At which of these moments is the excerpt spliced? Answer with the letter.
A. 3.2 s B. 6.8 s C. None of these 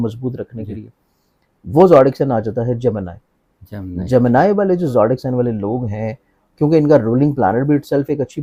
C